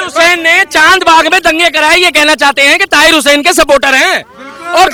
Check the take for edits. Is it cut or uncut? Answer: uncut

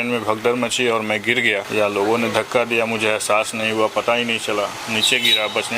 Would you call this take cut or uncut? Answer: cut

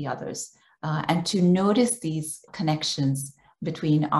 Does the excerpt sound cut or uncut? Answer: cut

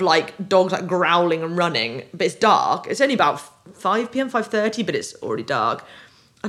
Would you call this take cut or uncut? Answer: uncut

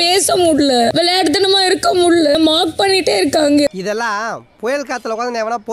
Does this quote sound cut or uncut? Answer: cut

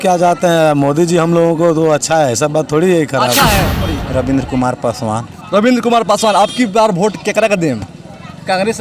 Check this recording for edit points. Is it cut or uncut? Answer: cut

